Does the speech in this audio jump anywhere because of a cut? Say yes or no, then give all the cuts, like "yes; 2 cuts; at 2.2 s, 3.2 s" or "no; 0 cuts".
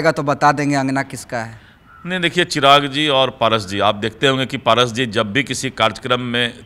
no; 0 cuts